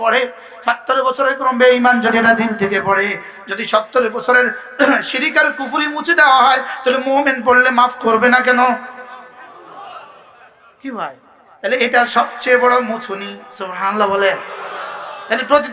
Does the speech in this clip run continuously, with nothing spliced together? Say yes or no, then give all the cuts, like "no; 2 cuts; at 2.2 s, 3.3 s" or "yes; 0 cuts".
yes; 0 cuts